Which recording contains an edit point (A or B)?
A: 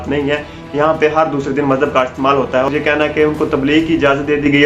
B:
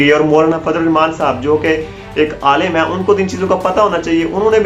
A